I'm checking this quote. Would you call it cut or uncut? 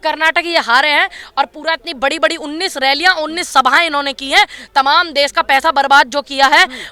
uncut